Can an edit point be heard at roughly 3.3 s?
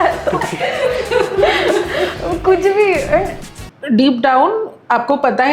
yes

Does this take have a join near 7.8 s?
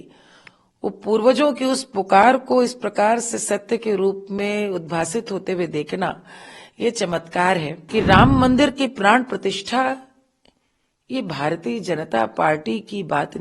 yes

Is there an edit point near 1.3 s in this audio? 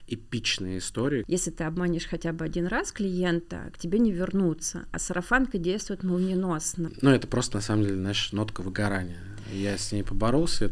yes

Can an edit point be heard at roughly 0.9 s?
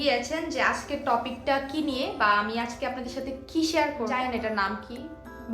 no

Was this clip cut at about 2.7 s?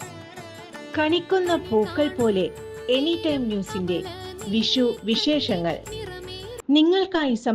no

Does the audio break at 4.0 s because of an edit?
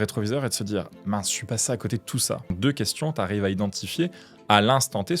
no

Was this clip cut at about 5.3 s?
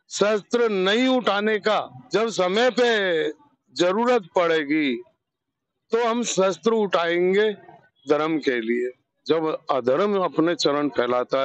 no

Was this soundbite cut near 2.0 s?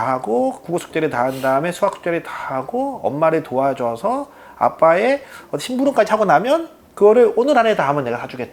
no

